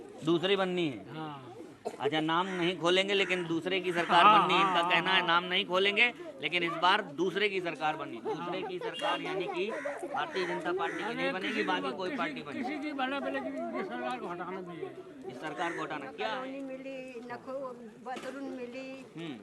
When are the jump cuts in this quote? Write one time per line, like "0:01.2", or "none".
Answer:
0:16.1

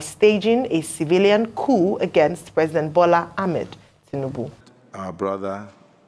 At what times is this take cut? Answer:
0:04.6

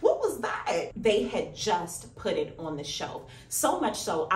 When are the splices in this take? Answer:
0:00.9

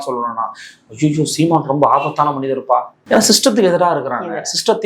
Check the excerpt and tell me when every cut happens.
0:02.9

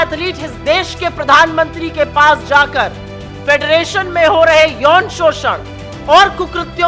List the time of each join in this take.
none

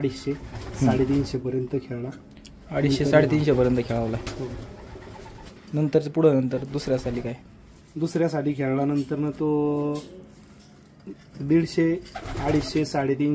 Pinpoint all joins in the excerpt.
none

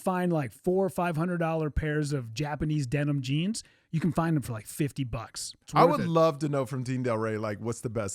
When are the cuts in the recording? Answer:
0:05.6

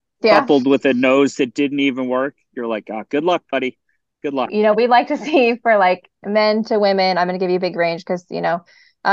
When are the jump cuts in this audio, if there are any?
0:04.5

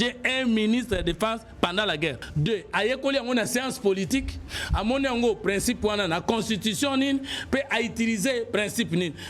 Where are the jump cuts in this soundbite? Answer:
0:02.2

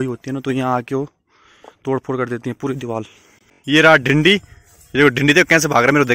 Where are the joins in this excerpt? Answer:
0:03.5

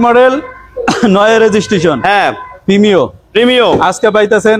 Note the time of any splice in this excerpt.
none

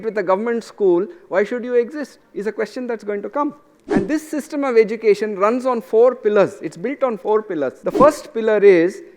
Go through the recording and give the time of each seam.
0:03.7
0:07.8

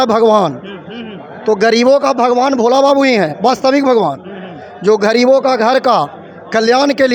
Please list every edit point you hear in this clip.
none

